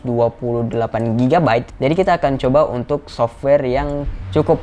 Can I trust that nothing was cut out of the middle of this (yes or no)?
no